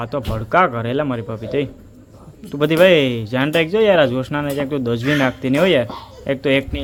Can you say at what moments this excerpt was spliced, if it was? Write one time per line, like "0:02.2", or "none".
none